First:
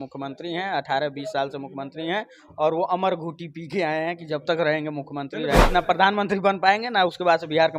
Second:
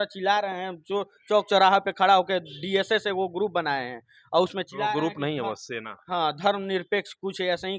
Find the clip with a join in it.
first; 1 cut; at 5.7 s

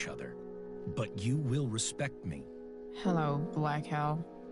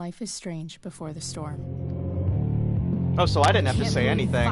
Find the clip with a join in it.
second; 1 cut; at 1.0 s

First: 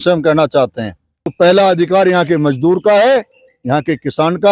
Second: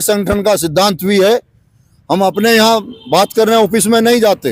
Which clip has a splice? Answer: first; 1 cut; at 1.3 s

